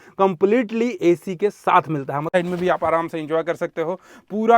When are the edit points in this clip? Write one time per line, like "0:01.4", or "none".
0:02.4